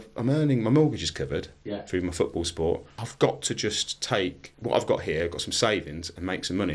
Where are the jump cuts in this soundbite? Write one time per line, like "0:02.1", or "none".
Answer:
0:03.0
0:04.5